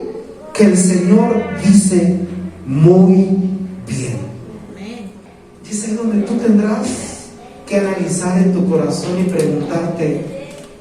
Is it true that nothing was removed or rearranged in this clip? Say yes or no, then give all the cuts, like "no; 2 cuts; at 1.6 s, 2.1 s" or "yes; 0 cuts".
no; 1 cut; at 5.2 s